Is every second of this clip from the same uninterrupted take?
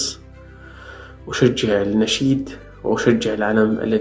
yes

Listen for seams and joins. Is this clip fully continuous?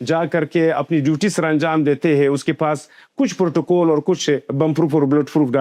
yes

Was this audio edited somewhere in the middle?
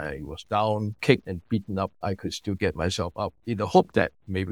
yes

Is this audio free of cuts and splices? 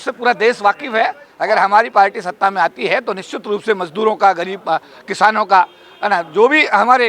no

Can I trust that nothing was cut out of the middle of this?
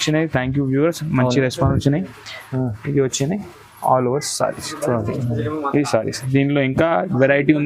yes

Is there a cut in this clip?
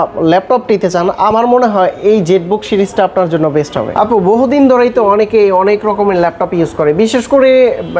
no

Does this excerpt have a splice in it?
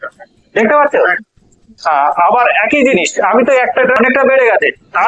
yes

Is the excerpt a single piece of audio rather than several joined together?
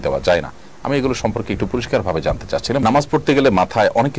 no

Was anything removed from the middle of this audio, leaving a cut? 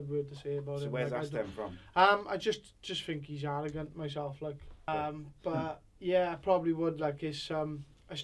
yes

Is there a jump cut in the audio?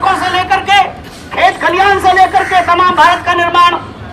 no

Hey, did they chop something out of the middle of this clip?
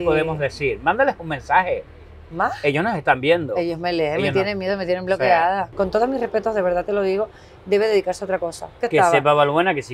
yes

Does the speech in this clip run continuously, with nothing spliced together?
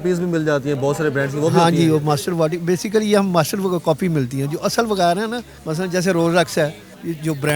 yes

